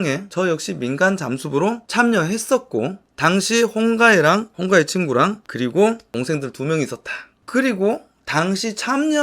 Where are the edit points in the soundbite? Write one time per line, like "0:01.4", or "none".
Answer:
none